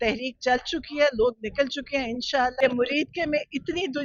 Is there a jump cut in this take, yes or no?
yes